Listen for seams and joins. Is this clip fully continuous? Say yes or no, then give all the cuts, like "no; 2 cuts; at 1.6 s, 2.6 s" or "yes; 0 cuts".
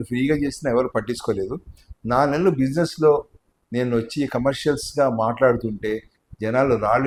yes; 0 cuts